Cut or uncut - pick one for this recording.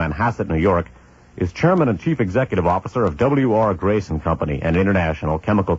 cut